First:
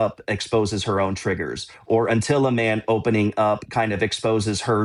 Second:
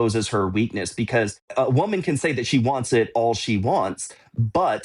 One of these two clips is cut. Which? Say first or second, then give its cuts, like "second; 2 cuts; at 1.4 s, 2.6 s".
second; 1 cut; at 1.5 s